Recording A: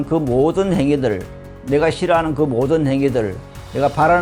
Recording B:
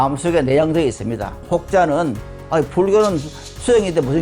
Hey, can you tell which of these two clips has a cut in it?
B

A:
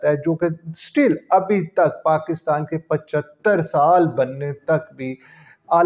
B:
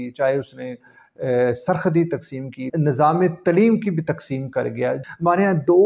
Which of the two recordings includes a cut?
B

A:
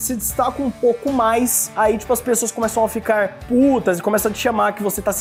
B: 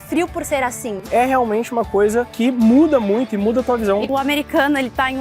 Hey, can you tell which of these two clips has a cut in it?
B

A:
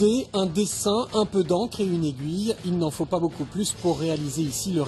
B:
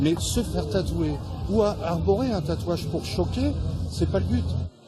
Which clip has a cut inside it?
A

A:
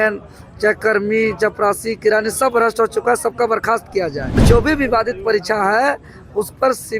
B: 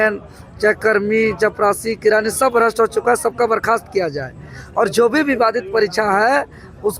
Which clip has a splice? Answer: A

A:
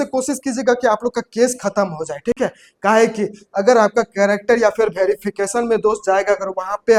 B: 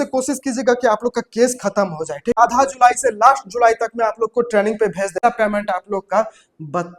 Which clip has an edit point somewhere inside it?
B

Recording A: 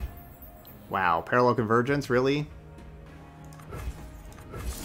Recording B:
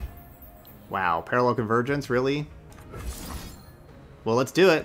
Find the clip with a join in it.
B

